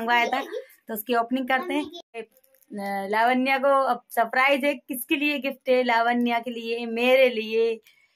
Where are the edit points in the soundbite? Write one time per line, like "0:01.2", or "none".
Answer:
0:02.1